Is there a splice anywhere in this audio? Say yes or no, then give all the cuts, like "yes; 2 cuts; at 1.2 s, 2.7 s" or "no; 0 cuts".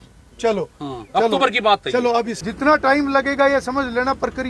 yes; 1 cut; at 2.4 s